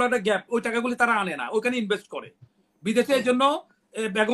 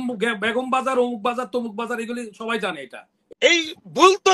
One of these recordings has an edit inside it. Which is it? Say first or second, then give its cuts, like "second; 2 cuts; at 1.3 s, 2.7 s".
second; 1 cut; at 3.1 s